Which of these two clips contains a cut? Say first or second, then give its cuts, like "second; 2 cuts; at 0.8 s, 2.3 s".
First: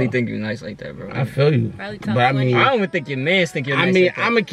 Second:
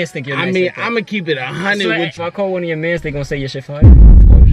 second; 2 cuts; at 2.1 s, 3.8 s